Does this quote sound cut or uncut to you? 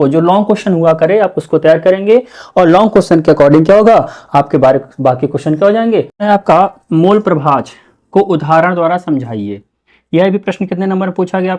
cut